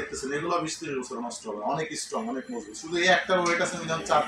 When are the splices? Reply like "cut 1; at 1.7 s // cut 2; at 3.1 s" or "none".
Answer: none